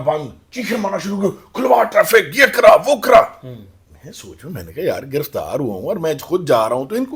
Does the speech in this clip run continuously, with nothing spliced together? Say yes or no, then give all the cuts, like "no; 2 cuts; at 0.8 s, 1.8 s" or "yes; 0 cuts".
yes; 0 cuts